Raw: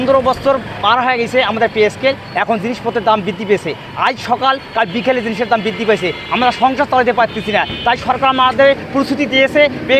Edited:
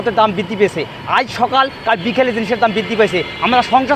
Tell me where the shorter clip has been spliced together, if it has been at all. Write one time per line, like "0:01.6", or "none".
none